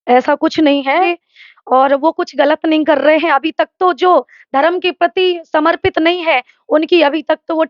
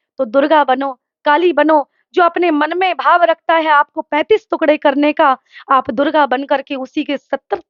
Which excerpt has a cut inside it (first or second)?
first